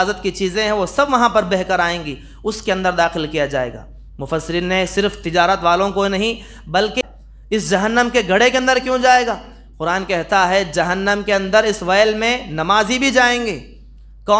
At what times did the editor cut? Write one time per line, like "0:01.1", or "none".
0:07.0